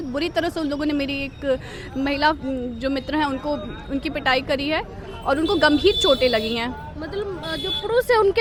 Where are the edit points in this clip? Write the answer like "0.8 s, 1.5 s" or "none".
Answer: none